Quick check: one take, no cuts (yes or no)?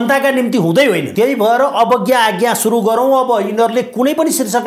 no